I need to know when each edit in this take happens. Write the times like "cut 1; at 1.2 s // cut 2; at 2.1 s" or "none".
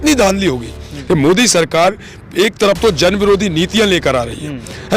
cut 1; at 0.9 s